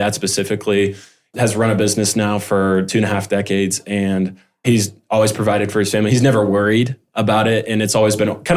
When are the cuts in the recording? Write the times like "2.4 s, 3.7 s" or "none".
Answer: none